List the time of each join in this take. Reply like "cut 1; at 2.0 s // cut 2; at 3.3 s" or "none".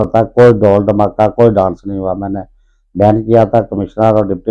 none